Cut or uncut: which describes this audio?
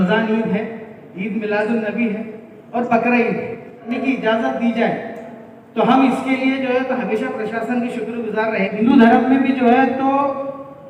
cut